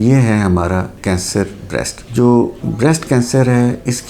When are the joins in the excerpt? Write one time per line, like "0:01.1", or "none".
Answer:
none